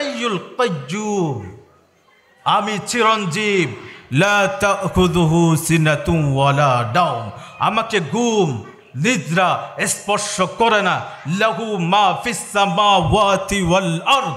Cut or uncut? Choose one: uncut